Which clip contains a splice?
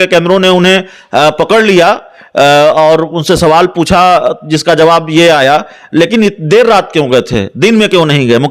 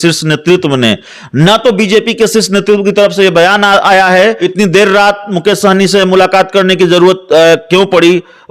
second; 1 cut; at 4.4 s

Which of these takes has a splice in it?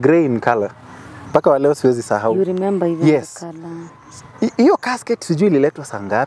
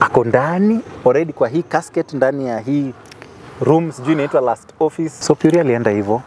second; 1 cut; at 5.1 s

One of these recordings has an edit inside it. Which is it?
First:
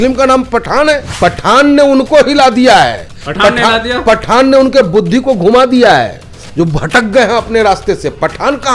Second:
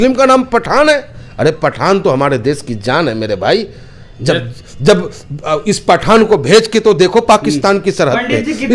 first; 1 cut; at 1.1 s

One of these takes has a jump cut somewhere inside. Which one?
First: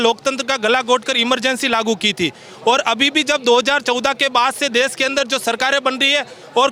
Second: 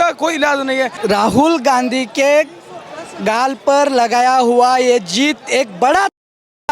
second; 1 cut; at 1.0 s

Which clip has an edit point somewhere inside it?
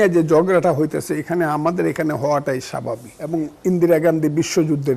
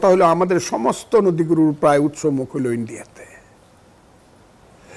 first; 1 cut; at 3.6 s

